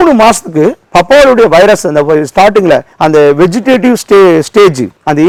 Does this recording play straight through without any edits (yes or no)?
yes